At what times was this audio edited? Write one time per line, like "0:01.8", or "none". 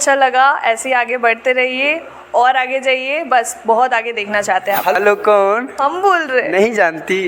0:04.9

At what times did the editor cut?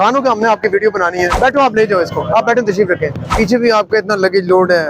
0:01.3
0:03.2

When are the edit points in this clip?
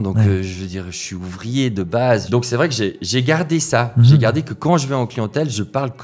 0:02.2

